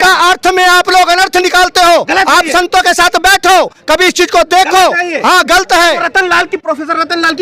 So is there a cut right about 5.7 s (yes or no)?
no